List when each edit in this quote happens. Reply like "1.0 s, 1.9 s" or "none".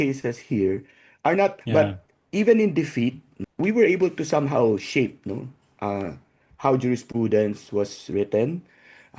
1.6 s, 3.3 s